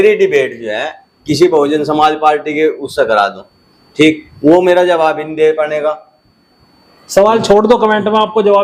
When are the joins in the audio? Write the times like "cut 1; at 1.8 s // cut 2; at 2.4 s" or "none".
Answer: none